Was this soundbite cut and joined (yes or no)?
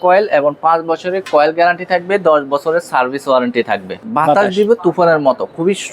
yes